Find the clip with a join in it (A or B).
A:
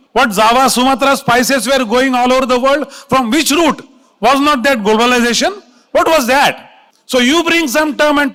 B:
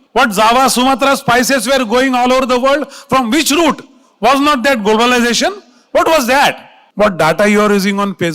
B